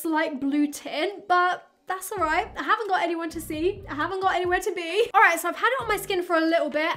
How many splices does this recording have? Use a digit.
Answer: 0